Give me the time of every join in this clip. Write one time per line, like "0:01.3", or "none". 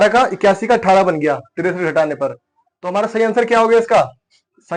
none